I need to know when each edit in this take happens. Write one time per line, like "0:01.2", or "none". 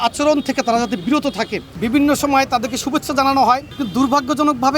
0:01.7
0:03.7